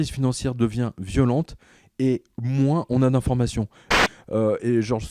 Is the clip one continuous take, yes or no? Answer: no